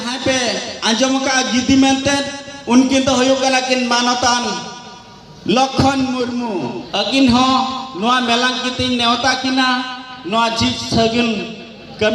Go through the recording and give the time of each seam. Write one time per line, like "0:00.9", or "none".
0:06.8